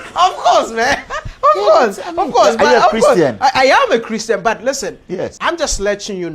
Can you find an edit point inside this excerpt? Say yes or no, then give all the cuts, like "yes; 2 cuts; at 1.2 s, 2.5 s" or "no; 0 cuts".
yes; 1 cut; at 5.4 s